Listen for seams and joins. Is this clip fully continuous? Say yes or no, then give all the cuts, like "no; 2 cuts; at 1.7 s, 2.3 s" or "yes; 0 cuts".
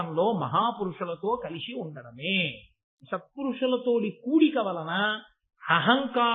no; 1 cut; at 3.0 s